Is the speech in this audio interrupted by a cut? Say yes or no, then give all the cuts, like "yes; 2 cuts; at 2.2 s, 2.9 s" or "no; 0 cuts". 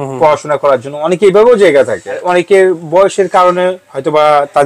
yes; 1 cut; at 2.2 s